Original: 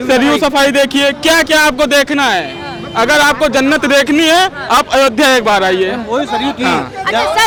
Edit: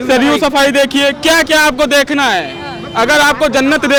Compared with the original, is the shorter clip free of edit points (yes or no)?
yes